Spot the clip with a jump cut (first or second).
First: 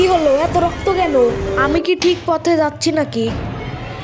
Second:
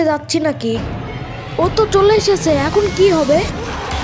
first